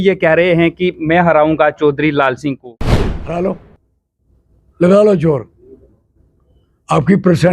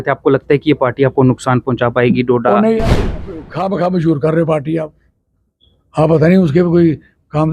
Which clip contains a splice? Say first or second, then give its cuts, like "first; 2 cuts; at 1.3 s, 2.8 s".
first; 1 cut; at 2.7 s